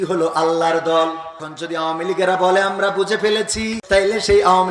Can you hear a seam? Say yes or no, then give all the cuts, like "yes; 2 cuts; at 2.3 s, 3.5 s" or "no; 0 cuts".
yes; 2 cuts; at 1.5 s, 3.8 s